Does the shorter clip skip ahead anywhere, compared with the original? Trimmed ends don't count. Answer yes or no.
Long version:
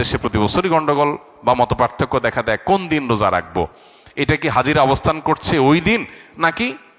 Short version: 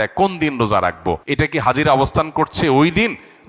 yes